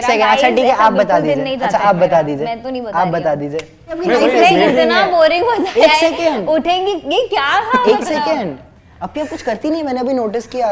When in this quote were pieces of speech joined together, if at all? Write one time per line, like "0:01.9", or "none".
0:04.0